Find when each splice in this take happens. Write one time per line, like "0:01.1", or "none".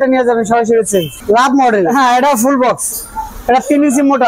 0:01.1